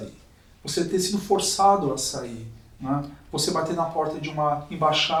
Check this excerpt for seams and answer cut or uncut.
uncut